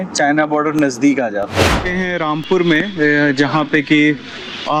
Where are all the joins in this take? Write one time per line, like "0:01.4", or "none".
none